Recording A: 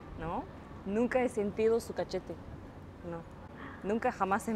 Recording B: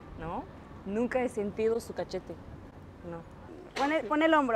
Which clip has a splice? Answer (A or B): B